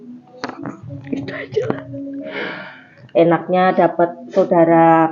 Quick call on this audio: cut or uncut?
cut